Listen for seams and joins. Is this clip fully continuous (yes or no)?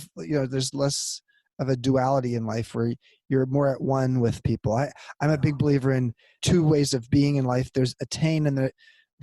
no